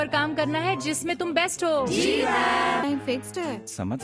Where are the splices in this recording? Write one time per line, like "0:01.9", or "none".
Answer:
0:02.8